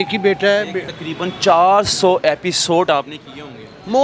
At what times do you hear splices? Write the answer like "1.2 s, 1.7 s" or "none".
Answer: 0.9 s